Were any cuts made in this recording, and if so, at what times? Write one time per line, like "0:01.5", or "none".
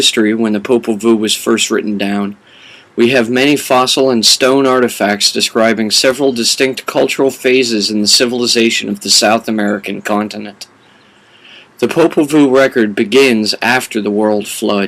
0:04.2